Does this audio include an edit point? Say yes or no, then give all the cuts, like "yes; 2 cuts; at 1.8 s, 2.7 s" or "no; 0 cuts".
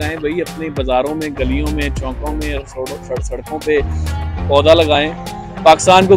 no; 0 cuts